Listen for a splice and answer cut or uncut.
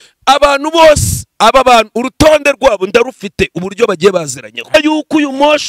cut